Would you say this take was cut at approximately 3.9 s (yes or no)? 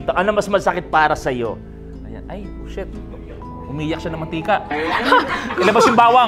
no